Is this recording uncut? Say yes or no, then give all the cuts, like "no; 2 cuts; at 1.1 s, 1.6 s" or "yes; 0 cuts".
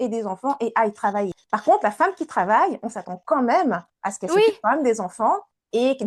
no; 1 cut; at 1.4 s